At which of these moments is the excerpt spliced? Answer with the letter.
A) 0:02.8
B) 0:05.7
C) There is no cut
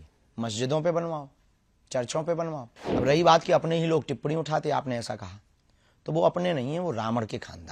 A